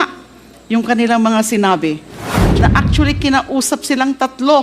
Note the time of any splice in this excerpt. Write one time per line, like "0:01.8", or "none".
0:02.5